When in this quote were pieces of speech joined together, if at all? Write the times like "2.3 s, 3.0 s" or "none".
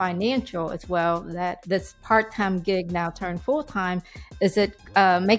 1.6 s